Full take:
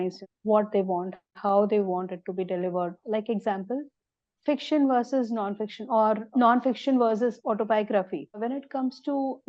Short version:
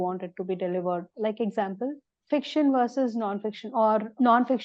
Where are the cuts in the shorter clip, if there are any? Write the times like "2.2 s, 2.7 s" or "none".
2.1 s

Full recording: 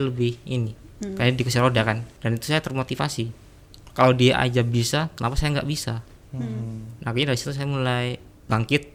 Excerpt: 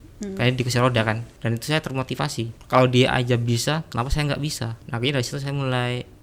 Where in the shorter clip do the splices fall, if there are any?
2.6 s, 4.8 s

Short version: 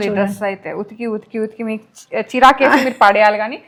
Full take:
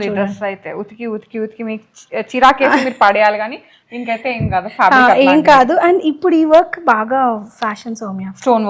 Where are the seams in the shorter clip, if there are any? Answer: none

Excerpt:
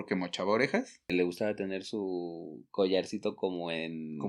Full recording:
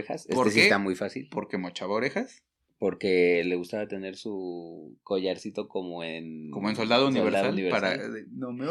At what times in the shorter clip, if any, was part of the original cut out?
1.1 s

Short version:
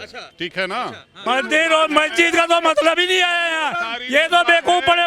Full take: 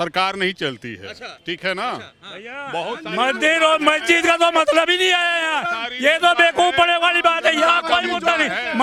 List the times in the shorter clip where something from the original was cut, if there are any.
1.2 s

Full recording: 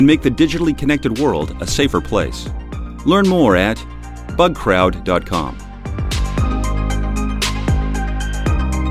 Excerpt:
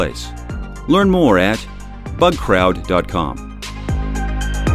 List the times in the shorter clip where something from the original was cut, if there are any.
3.6 s

